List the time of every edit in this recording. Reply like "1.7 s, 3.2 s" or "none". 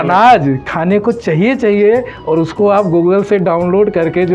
none